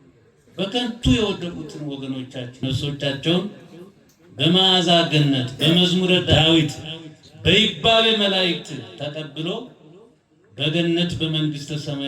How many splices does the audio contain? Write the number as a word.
two